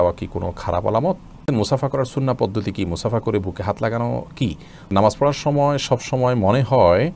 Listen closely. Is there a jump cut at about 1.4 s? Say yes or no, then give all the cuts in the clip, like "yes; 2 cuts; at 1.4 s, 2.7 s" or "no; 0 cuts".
yes; 2 cuts; at 1.4 s, 4.9 s